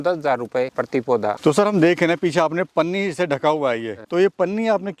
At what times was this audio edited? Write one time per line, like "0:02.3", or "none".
none